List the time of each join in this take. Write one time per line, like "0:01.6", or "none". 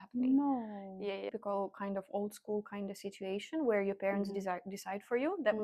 0:01.2